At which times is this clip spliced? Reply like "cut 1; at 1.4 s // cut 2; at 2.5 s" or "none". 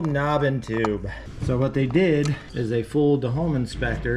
none